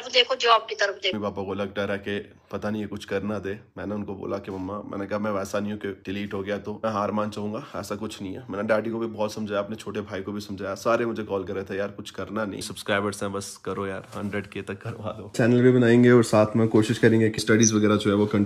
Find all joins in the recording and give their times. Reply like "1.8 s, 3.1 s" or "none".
1.1 s, 12.6 s, 15.4 s, 17.4 s